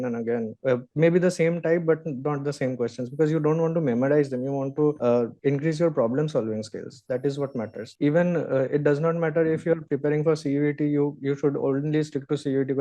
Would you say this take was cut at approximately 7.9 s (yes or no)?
yes